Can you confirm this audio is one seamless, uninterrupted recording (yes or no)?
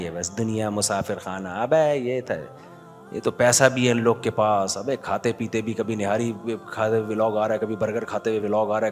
yes